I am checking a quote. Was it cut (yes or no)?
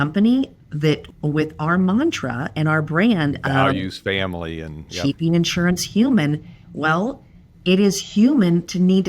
yes